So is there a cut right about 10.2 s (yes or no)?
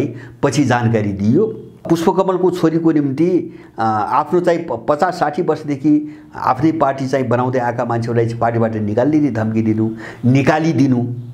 no